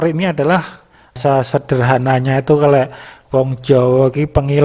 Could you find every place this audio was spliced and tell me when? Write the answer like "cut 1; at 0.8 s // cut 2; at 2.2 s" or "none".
cut 1; at 1.1 s